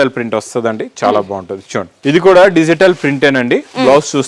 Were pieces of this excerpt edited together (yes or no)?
yes